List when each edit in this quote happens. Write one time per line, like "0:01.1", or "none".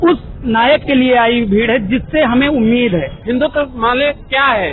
0:03.1

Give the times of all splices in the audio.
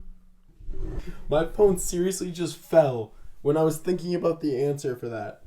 0:01.0

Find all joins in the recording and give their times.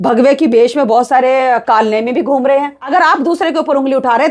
0:02.9

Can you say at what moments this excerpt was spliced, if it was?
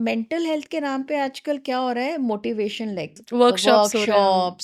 0:03.2

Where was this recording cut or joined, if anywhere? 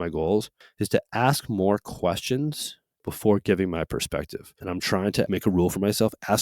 0:03.0
0:04.8

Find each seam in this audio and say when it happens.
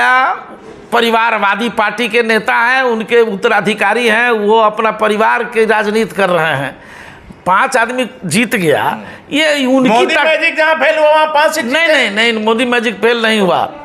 none

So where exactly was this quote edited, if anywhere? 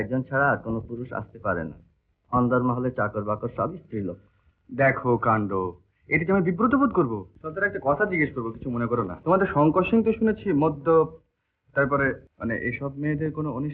0:07.4
0:09.1
0:12.3

